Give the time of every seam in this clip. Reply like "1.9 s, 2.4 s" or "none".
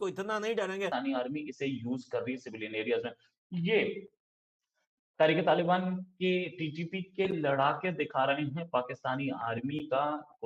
1.3 s